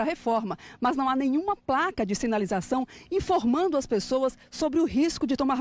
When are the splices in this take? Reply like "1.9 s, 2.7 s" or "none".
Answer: 1.4 s